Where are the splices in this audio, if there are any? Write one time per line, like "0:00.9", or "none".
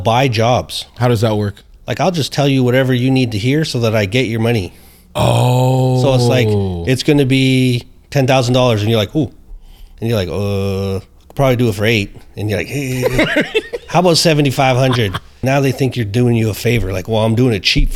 0:00.9
0:15.4

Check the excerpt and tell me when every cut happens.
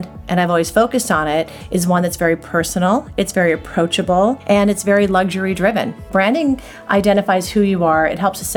0:04.4
0:06.1

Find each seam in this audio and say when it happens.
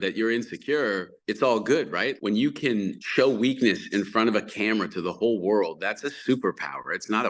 0:01.2
0:02.2
0:03.0

